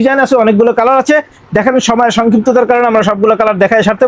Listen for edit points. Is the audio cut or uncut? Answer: uncut